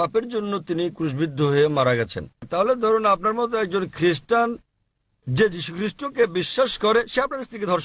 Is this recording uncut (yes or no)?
no